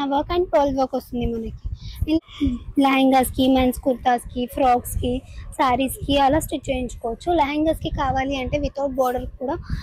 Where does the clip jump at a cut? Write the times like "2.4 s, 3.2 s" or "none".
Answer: 2.2 s